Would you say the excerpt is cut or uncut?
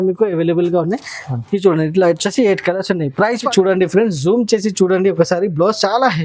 cut